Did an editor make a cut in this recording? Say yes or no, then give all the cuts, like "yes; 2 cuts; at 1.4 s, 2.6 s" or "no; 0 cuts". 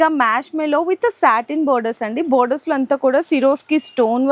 no; 0 cuts